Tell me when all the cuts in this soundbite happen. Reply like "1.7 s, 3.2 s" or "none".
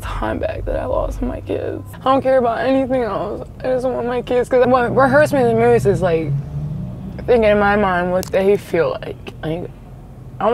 1.9 s, 4.6 s, 9.3 s